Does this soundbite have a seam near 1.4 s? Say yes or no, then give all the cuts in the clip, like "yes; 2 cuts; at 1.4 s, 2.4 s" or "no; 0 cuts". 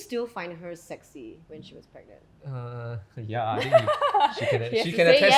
yes; 1 cut; at 1.4 s